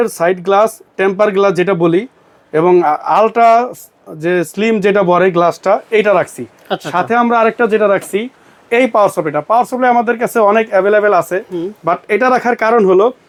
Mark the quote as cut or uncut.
uncut